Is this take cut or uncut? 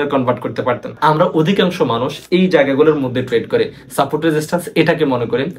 cut